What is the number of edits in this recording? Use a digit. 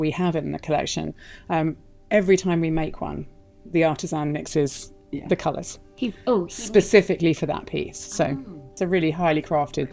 1